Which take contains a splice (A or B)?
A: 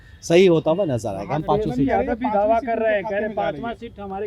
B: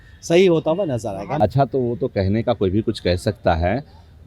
B